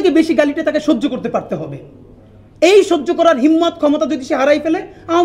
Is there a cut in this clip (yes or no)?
no